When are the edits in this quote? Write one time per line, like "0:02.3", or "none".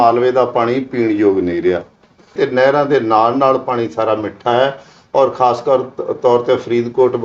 0:02.3